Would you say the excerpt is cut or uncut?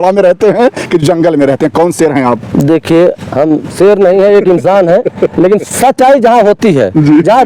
uncut